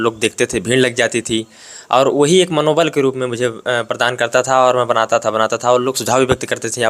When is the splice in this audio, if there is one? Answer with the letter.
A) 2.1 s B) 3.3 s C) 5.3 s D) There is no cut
D